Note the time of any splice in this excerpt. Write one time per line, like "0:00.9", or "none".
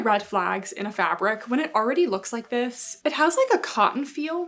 none